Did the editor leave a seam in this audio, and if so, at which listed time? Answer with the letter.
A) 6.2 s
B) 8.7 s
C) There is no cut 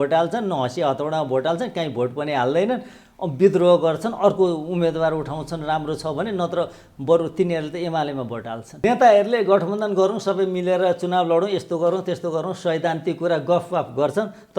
B